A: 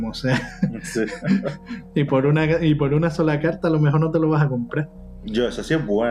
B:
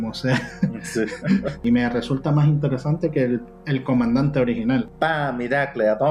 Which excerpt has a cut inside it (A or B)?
B